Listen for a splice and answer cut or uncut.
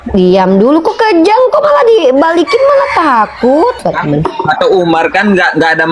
cut